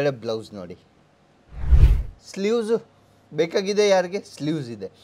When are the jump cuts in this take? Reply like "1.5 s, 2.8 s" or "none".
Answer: 1.8 s